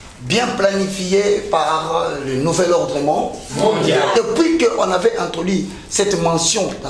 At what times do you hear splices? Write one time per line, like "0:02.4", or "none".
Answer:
0:04.2